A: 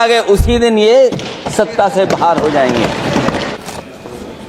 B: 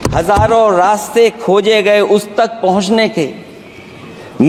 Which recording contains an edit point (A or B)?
A